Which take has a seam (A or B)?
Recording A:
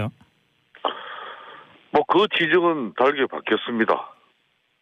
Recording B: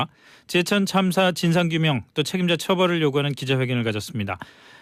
A